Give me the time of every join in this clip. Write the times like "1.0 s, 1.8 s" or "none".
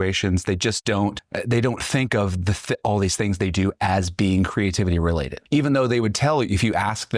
1.3 s